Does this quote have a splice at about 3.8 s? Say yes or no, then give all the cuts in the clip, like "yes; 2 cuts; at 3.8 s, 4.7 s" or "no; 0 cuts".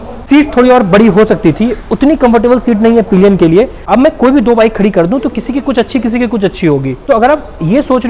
yes; 2 cuts; at 3.8 s, 6.9 s